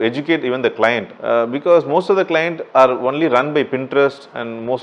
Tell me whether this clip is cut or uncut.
cut